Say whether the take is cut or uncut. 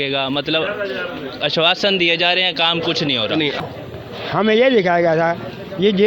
cut